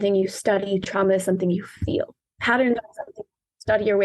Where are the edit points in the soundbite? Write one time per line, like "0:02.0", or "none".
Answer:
0:02.1